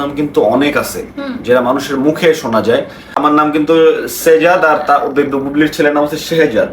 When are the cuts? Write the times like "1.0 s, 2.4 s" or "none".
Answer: 3.2 s